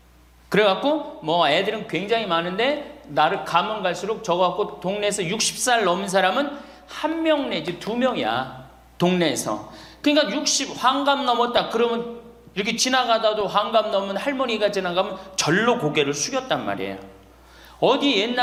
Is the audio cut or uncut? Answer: uncut